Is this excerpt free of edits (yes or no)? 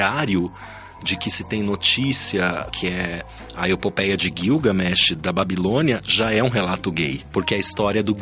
no